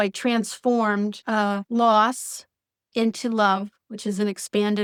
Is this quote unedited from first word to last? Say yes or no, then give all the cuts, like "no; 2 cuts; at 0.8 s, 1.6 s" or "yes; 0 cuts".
yes; 0 cuts